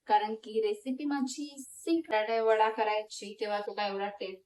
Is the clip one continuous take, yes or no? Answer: no